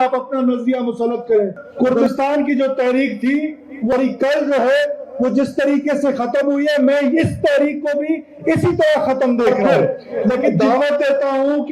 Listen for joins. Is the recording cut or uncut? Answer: cut